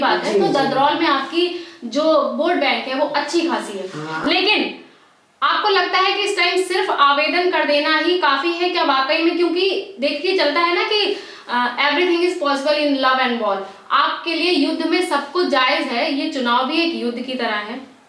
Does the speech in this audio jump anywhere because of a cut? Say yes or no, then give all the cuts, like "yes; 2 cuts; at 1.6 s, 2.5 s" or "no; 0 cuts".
no; 0 cuts